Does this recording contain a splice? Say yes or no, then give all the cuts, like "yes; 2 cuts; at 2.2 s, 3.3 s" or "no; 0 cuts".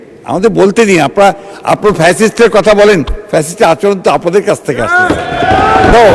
no; 0 cuts